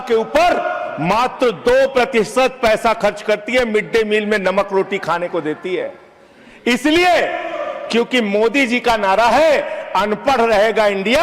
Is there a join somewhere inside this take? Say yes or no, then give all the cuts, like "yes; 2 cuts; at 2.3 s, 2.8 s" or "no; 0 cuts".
no; 0 cuts